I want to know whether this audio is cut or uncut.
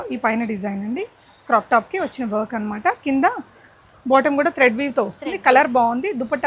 uncut